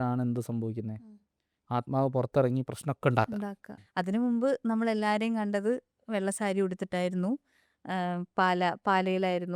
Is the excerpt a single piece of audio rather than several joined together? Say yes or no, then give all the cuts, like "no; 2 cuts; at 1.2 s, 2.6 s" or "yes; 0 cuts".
no; 1 cut; at 3.8 s